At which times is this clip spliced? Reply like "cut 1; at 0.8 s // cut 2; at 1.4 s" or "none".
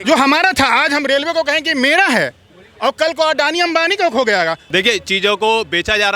cut 1; at 4.6 s